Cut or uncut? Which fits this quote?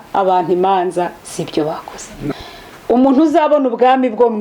cut